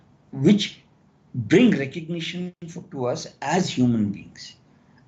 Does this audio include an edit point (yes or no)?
no